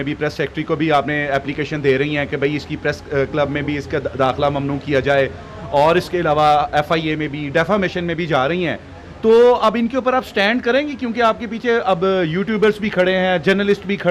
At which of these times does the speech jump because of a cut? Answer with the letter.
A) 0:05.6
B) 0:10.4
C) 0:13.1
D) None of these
D